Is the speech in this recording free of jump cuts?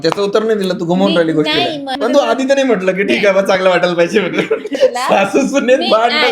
no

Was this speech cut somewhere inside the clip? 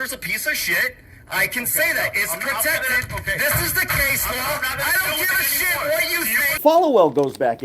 yes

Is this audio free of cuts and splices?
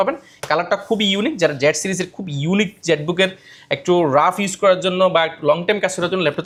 yes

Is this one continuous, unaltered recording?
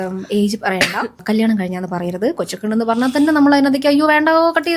yes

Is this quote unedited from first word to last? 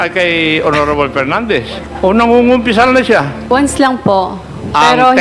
no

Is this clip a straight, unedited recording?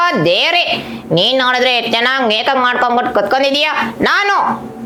yes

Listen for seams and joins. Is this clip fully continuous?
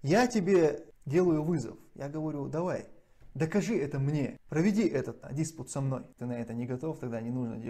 no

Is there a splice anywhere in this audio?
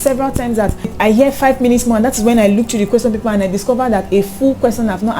yes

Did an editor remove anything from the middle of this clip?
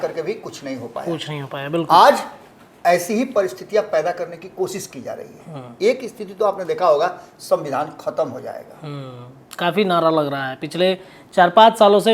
no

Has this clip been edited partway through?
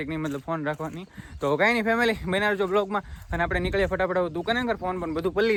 no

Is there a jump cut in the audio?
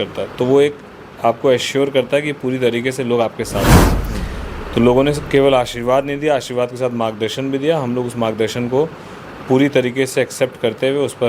no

